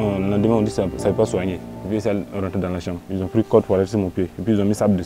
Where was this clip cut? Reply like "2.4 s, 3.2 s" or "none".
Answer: 1.7 s